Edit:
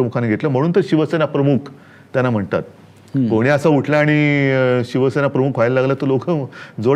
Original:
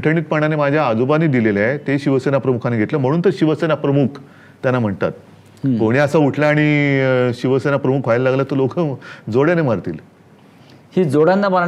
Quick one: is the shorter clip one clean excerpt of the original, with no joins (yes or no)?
yes